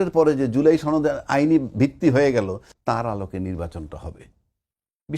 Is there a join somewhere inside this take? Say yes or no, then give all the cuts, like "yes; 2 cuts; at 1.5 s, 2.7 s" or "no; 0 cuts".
yes; 1 cut; at 2.7 s